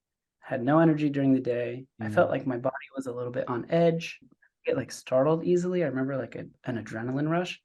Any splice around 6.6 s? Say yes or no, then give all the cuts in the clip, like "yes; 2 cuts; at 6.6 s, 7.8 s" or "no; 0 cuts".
yes; 2 cuts; at 2.0 s, 6.6 s